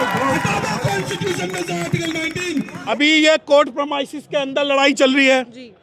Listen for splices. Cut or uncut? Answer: cut